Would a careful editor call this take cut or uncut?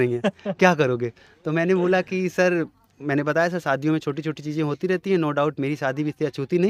uncut